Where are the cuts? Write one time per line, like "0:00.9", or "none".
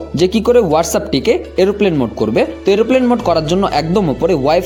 none